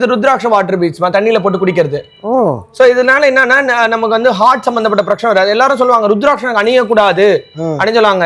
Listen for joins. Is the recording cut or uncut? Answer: uncut